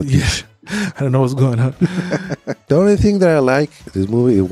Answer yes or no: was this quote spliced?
yes